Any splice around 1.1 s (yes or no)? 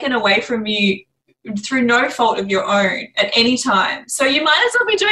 no